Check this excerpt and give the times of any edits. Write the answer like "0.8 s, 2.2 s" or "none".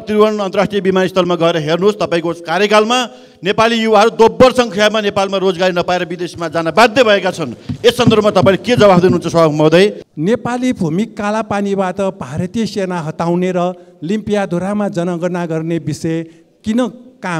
10.1 s